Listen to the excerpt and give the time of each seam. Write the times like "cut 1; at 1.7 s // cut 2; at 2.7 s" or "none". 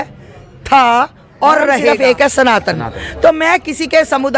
cut 1; at 1.9 s